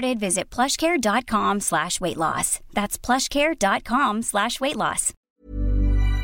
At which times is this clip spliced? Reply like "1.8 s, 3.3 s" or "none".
5.1 s